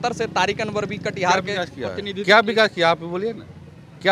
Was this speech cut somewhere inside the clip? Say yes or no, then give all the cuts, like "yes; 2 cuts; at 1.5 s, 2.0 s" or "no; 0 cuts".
no; 0 cuts